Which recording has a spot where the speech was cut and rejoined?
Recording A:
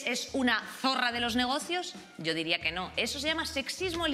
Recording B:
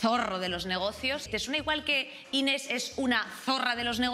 B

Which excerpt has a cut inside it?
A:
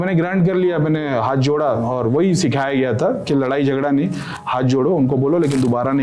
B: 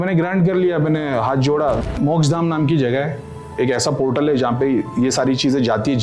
B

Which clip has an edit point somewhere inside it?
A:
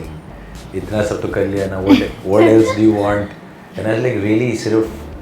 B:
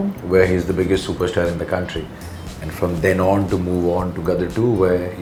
A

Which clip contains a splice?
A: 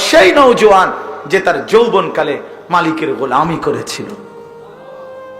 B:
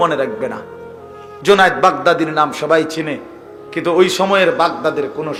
A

